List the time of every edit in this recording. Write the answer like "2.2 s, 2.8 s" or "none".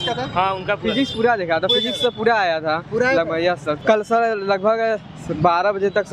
3.8 s